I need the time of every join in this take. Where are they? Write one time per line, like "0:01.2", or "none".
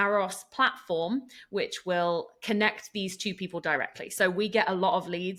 none